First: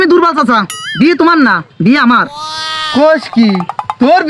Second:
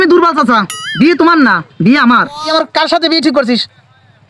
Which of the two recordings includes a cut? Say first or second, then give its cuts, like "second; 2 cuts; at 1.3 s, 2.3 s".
second; 1 cut; at 2.5 s